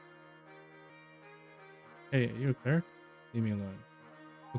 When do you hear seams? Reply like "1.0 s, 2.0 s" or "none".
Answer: 0.9 s

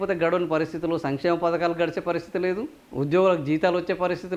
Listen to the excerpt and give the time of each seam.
none

